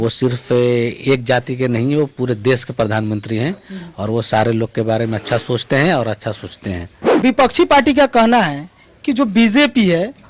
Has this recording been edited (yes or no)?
yes